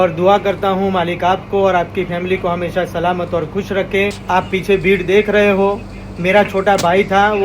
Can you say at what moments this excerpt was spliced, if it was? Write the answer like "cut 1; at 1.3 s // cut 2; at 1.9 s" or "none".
cut 1; at 4.2 s